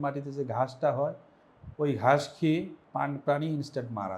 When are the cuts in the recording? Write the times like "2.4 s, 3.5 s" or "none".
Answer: 2.8 s